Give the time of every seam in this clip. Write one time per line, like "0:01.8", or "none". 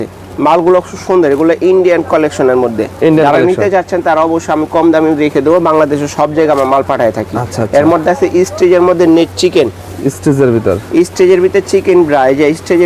none